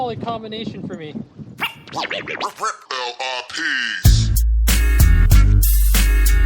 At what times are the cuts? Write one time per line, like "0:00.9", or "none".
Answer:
0:01.4